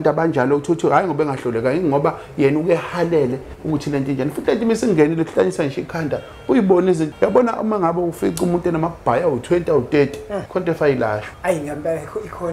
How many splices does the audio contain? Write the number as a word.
three